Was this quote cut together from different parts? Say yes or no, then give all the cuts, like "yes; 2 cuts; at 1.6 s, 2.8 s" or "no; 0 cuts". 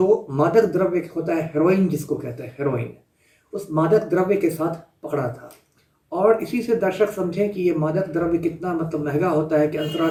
no; 0 cuts